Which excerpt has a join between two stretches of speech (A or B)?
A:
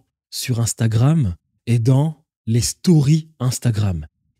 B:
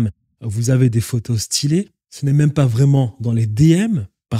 B